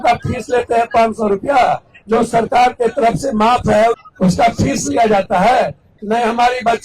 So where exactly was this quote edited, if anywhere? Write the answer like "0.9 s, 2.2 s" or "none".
1.9 s, 4.0 s, 5.9 s